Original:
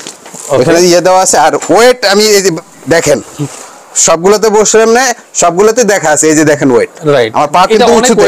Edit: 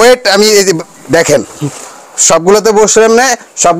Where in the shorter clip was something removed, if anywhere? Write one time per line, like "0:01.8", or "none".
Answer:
none